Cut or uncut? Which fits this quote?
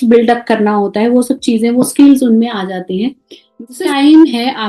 cut